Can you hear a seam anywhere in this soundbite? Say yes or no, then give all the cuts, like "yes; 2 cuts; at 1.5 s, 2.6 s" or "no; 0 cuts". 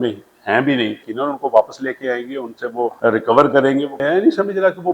yes; 3 cuts; at 1.0 s, 3.0 s, 4.0 s